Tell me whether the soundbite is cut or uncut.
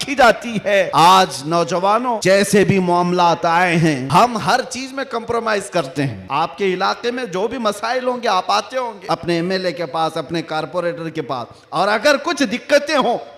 cut